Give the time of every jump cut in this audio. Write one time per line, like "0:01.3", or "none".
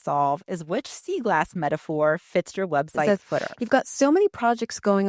0:03.1